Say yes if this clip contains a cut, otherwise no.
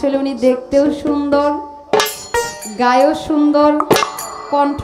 no